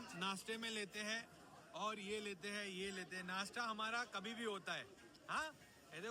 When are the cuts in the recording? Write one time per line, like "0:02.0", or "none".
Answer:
none